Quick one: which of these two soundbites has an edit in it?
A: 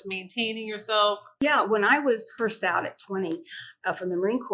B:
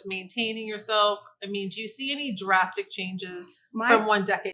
A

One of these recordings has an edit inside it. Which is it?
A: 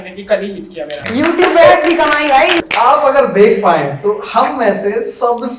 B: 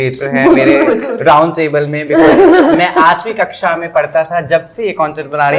A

